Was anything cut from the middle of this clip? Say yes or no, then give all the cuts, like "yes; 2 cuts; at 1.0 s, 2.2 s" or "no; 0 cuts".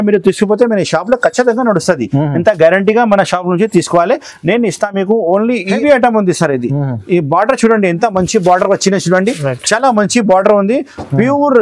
yes; 1 cut; at 5.8 s